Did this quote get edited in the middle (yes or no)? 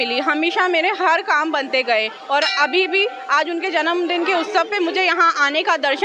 no